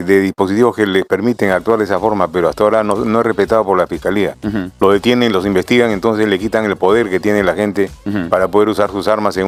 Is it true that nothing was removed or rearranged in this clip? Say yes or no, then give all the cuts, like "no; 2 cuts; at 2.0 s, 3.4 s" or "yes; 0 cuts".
yes; 0 cuts